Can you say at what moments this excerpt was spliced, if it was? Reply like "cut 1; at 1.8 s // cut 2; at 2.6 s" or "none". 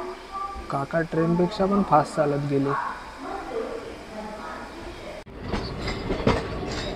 none

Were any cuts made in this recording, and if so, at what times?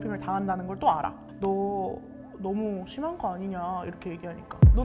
cut 1; at 1.2 s

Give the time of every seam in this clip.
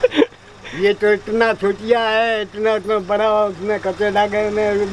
none

